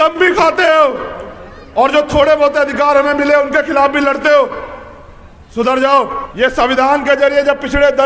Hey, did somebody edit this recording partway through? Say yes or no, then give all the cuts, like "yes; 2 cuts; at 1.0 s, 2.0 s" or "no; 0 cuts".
yes; 1 cut; at 6.2 s